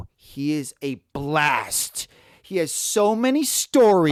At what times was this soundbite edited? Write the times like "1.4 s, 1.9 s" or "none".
none